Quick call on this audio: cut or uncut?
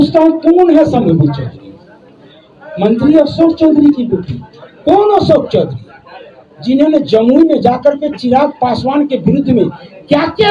uncut